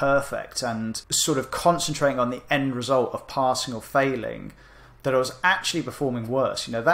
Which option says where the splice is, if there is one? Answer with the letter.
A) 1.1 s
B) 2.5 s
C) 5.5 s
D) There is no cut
A